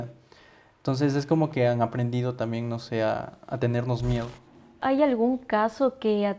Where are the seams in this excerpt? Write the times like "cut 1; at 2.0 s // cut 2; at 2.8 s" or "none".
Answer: cut 1; at 4.8 s